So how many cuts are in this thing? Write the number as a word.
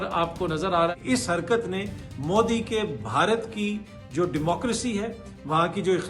one